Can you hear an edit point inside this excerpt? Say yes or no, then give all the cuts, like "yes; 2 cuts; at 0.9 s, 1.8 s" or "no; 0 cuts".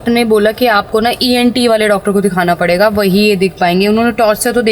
no; 0 cuts